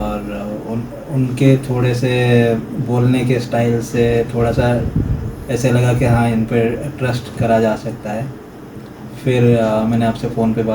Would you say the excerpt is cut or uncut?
uncut